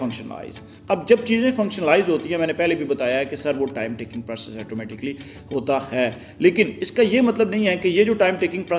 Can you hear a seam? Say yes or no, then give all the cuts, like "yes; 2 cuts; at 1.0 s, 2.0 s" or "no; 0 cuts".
no; 0 cuts